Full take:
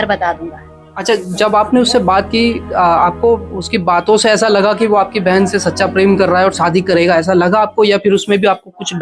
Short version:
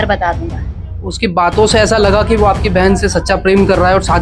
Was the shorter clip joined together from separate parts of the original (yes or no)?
yes